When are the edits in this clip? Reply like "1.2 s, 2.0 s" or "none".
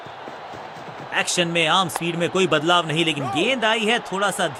none